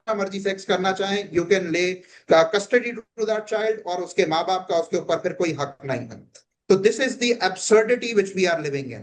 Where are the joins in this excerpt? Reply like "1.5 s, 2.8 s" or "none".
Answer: none